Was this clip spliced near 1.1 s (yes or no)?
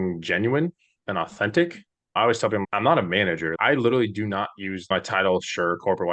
no